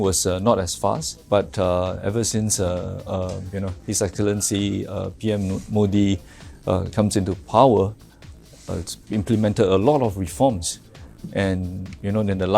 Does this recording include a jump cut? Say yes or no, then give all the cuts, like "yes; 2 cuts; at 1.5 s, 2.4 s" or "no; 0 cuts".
yes; 1 cut; at 1.1 s